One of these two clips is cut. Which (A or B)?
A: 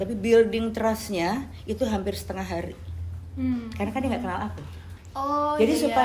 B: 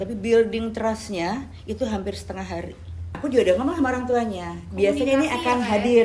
B